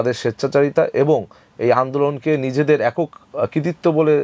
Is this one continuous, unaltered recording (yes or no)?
yes